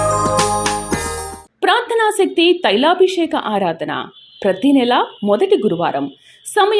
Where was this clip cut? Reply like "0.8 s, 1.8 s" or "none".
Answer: 1.3 s